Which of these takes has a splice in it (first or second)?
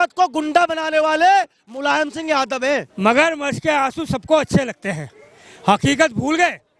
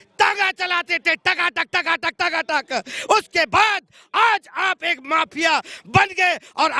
first